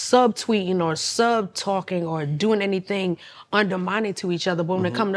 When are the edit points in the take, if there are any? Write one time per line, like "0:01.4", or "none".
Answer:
none

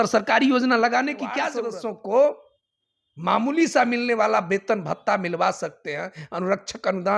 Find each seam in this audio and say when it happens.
0:01.6

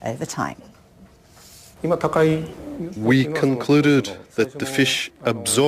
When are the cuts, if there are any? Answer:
0:04.2

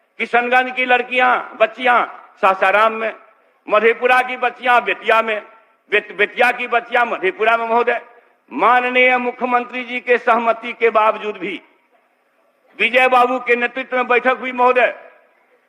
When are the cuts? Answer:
none

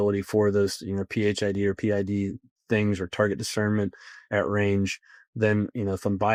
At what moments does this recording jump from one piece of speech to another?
none

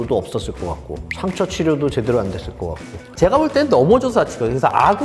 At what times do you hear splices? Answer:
0:03.1

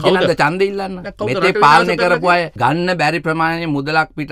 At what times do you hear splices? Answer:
0:02.5

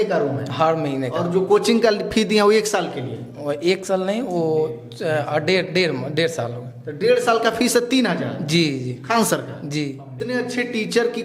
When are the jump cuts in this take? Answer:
0:10.2

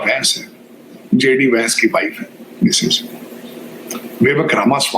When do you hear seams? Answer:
none

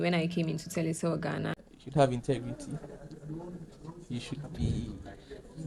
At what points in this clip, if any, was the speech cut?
0:01.6

